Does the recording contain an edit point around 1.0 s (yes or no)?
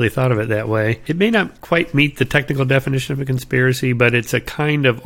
yes